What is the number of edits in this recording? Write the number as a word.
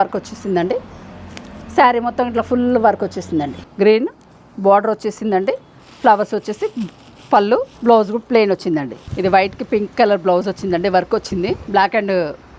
four